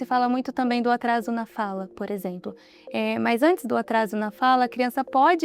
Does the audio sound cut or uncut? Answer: uncut